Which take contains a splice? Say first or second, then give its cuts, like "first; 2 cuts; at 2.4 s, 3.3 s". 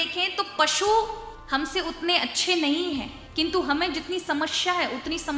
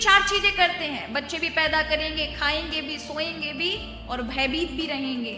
first; 2 cuts; at 1.3 s, 3.2 s